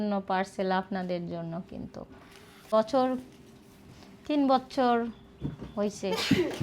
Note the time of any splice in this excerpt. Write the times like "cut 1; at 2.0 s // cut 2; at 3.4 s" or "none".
cut 1; at 2.7 s